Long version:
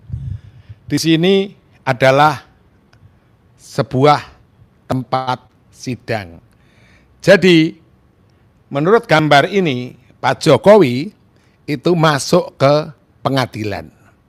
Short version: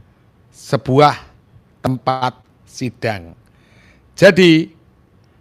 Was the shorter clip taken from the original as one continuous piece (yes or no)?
yes